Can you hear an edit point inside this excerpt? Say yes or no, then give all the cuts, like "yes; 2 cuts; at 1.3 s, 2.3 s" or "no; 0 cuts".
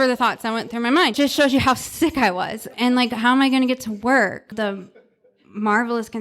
yes; 3 cuts; at 1.2 s, 2.7 s, 4.5 s